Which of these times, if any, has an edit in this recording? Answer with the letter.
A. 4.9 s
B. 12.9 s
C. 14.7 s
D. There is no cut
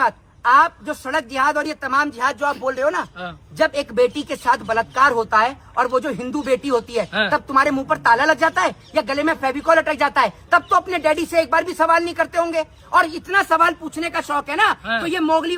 D